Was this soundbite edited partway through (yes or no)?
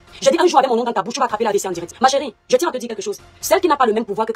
yes